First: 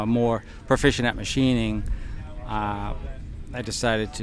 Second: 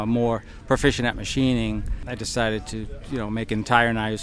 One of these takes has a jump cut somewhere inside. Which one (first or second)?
second